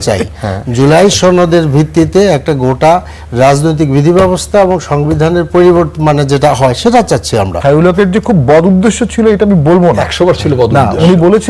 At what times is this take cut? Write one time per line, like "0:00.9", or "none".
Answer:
0:07.6